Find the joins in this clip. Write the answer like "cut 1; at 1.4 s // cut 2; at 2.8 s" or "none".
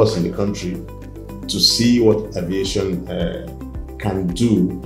none